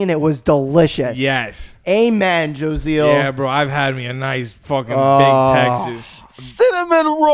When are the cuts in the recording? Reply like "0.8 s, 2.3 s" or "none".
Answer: none